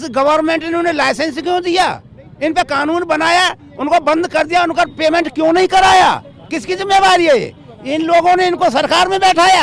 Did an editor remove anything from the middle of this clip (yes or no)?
no